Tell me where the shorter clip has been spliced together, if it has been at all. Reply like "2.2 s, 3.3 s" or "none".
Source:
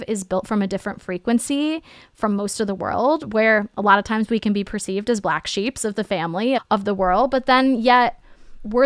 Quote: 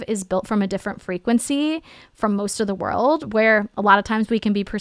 none